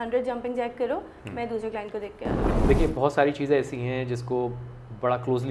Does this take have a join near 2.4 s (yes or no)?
yes